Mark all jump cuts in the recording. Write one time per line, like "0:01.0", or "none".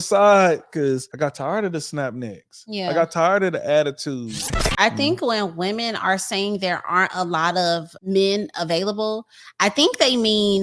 0:01.1
0:04.6

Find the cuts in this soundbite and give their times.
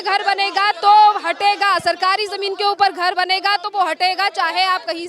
none

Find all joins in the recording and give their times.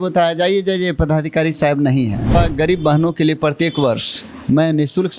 0:02.3

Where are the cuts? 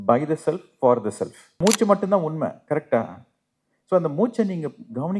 0:01.6

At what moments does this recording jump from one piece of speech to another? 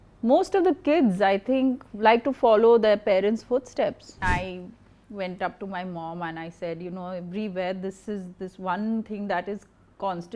0:04.2

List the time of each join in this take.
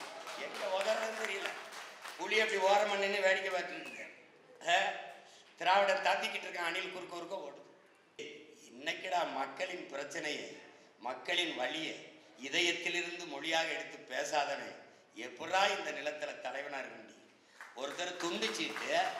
0:08.2

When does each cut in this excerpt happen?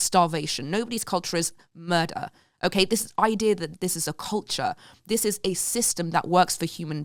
none

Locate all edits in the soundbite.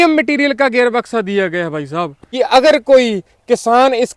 0:02.2

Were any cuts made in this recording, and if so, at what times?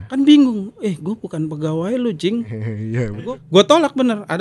0:03.2

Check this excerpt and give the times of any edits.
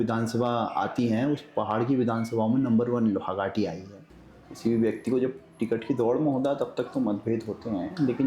0:04.0

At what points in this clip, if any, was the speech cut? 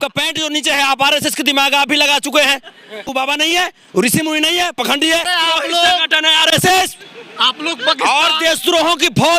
0:03.1
0:05.3

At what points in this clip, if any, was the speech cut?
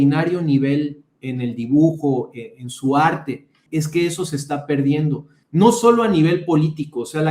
0:03.6
0:05.3

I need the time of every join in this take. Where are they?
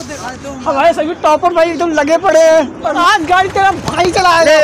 0:02.9

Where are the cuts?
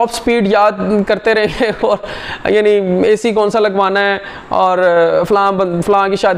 none

